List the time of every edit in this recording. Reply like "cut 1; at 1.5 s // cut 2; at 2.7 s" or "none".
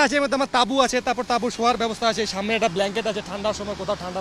none